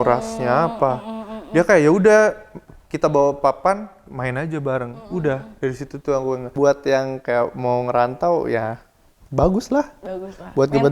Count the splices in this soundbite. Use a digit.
1